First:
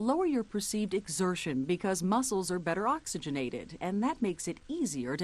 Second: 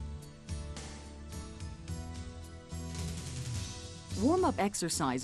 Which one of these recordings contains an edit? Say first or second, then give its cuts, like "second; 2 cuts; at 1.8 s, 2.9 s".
second; 1 cut; at 4.2 s